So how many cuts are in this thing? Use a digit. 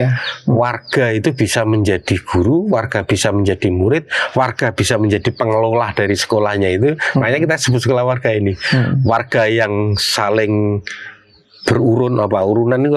0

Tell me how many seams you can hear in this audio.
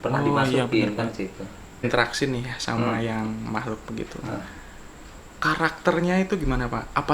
1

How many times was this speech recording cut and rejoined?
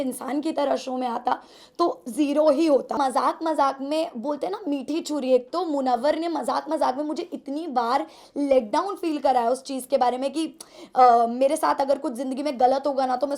1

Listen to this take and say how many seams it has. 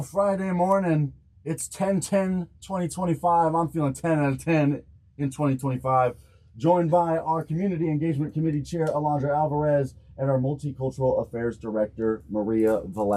0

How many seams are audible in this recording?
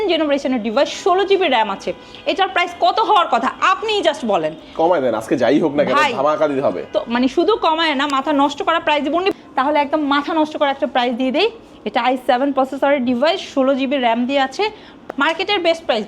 2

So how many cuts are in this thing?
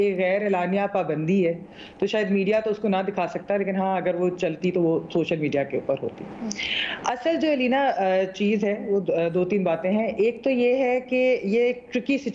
0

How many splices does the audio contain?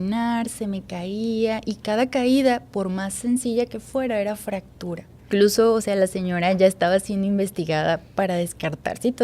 1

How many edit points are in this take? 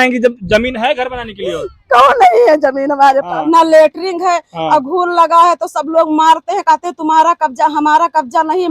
1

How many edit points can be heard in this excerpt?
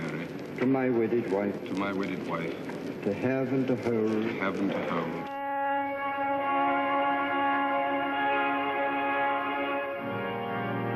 1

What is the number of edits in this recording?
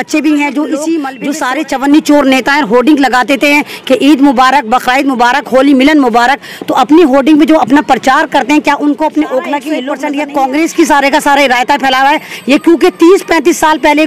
2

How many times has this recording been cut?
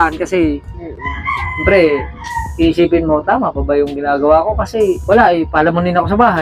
1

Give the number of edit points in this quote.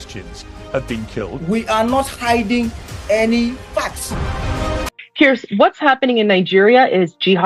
1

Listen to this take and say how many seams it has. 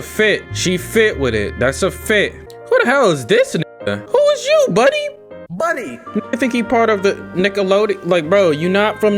0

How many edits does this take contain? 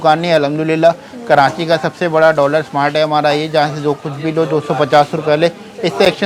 0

